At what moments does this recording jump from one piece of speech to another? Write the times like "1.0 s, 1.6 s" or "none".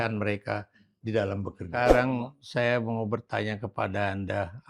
1.7 s